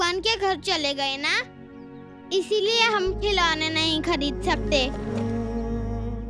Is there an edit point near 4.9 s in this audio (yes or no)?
yes